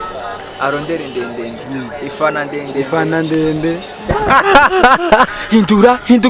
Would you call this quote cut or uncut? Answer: cut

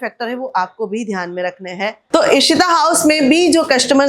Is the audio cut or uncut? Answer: uncut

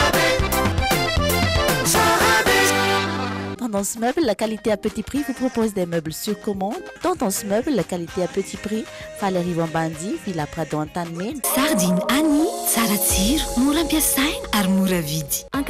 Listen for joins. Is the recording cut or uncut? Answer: cut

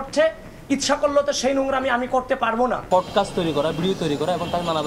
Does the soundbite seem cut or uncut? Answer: cut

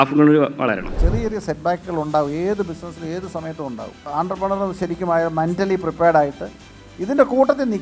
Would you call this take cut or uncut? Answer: cut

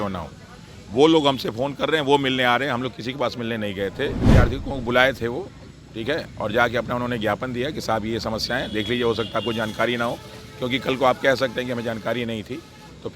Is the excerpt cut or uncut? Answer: cut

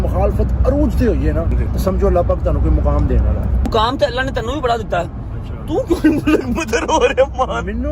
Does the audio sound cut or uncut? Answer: cut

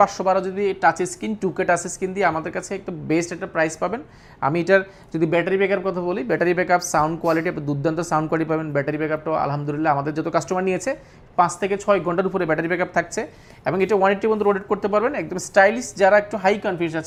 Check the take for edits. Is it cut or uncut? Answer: uncut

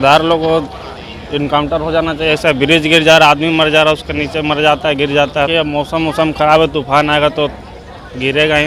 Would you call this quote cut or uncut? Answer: cut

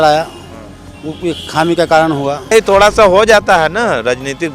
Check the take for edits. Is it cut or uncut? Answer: cut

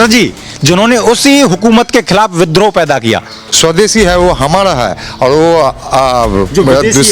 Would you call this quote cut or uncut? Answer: cut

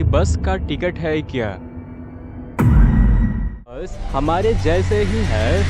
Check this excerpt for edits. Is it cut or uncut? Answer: cut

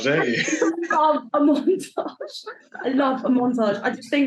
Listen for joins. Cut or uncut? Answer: uncut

